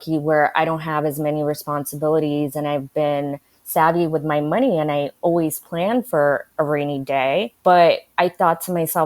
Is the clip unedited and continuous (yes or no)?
no